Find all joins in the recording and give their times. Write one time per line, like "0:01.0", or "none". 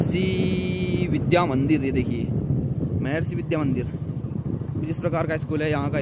none

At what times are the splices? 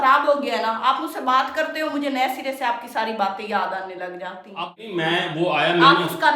0:04.4

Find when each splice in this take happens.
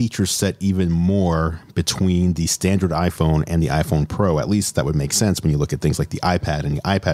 none

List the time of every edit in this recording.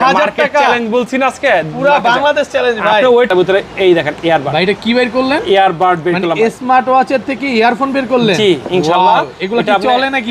0:03.3

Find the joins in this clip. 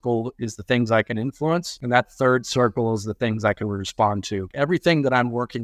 0:01.7
0:04.5

